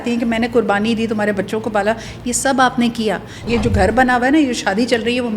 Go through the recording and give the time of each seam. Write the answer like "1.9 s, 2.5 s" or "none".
3.4 s